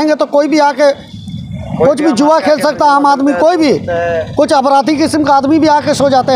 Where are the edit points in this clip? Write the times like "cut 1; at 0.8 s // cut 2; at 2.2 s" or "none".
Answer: none